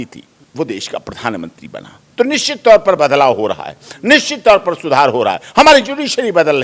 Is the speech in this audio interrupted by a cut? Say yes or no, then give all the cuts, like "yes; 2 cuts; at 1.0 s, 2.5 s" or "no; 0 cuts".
no; 0 cuts